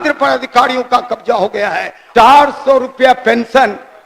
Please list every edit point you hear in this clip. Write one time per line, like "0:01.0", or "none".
0:02.0